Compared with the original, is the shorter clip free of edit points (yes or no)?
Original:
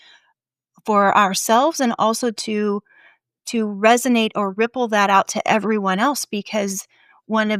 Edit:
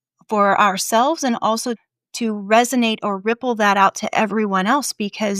no